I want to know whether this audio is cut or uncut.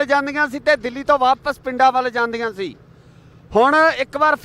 uncut